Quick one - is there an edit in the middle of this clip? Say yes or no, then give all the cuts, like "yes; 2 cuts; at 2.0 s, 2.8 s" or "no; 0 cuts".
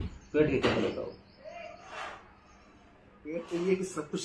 no; 0 cuts